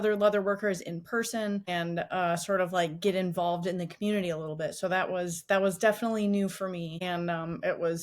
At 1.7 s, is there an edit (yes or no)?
yes